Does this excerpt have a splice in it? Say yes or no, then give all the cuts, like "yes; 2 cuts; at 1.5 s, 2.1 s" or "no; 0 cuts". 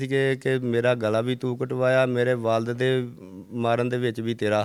no; 0 cuts